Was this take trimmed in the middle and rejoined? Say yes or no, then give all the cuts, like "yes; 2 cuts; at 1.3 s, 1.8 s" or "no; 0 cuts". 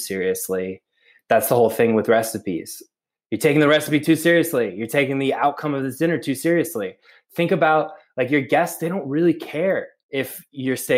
yes; 1 cut; at 10.0 s